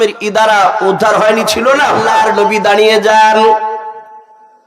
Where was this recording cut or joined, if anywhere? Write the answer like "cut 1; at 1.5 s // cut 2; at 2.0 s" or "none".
cut 1; at 2.1 s